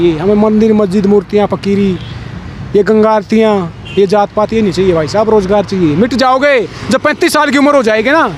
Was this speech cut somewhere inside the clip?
no; 0 cuts

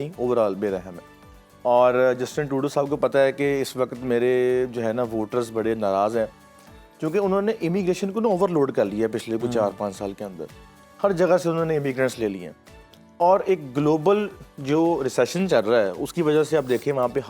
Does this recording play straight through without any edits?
yes; 0 cuts

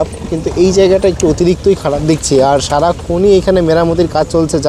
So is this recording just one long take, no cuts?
yes; 0 cuts

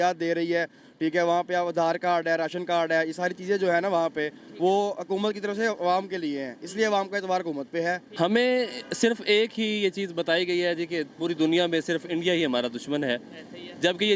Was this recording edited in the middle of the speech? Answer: yes; 1 cut; at 8.1 s

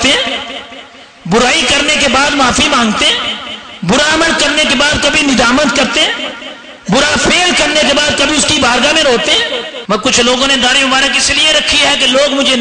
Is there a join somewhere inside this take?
yes; 1 cut; at 9.7 s

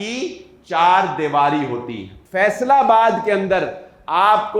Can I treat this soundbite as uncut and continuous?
no; 1 cut; at 2.2 s

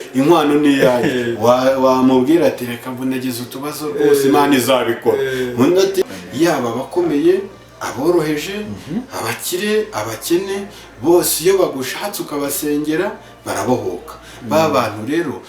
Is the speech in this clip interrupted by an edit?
yes; 1 cut; at 6.0 s

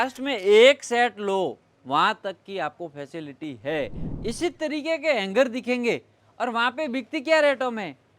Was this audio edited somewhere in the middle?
yes; 1 cut; at 4.0 s

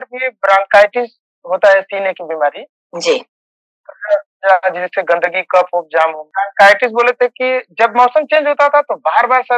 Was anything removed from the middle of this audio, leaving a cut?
yes; 1 cut; at 6.3 s

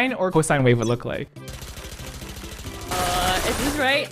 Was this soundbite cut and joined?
yes; 1 cut; at 1.2 s

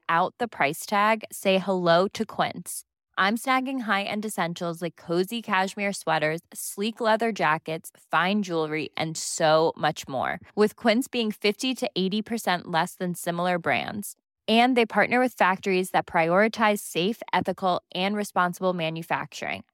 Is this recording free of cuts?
yes; 0 cuts

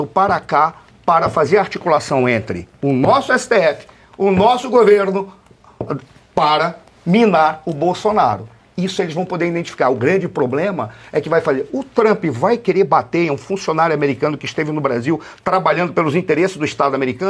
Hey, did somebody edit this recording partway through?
no; 0 cuts

